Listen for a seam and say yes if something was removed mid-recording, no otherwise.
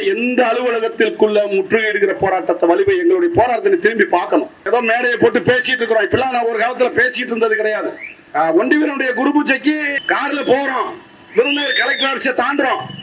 yes